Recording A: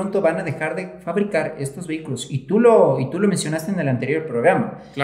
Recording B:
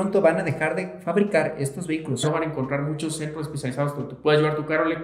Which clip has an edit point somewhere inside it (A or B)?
B